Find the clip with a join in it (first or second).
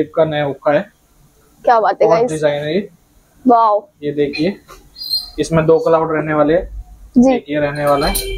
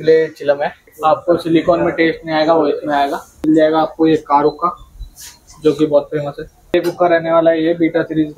second